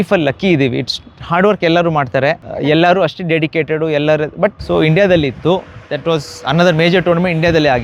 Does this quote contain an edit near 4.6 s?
yes; 1 cut; at 4.6 s

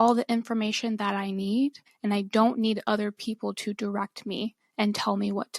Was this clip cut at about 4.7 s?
no; 1 cut; at 1.9 s

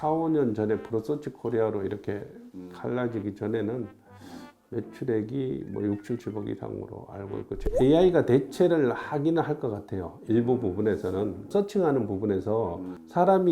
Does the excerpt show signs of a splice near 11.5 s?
yes; 2 cuts; at 7.6 s, 11.5 s

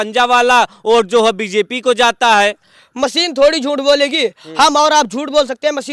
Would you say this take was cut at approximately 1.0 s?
no; 0 cuts

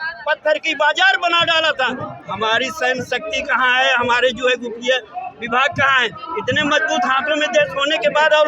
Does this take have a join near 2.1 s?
yes; 1 cut; at 2.1 s

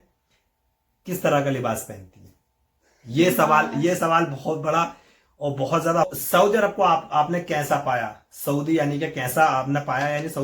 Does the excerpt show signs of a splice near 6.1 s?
yes; 1 cut; at 6.1 s

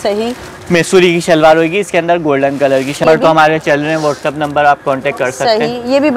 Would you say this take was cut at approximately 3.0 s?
yes; 1 cut; at 3.0 s

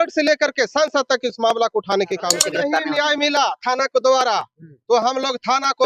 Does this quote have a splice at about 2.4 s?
yes; 1 cut; at 2.4 s

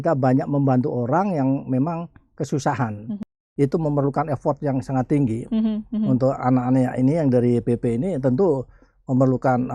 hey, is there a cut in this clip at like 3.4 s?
yes; 1 cut; at 3.4 s

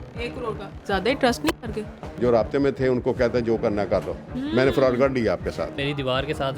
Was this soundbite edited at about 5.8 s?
yes; 2 cuts; at 2.1 s, 5.8 s

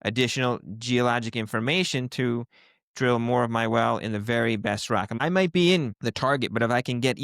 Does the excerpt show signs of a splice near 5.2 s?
yes; 1 cut; at 5.2 s

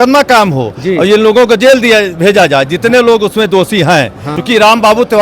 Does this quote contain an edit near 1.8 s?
no; 1 cut; at 4.3 s

